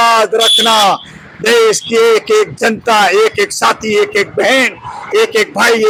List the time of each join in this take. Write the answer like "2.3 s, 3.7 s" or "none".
none